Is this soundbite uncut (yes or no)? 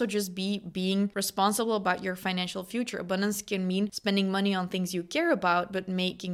no